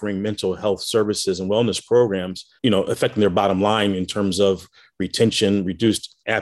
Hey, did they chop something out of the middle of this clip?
no; 0 cuts

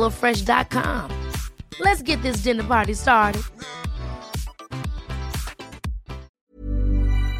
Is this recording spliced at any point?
yes; 1 cut; at 6.3 s

